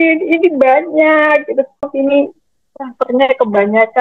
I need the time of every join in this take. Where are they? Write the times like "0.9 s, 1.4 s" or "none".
1.9 s